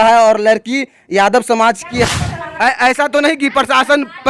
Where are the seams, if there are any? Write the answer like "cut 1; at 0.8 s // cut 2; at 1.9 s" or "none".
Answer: cut 1; at 2.0 s